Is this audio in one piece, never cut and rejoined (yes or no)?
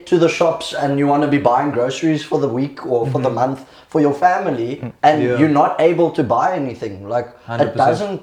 yes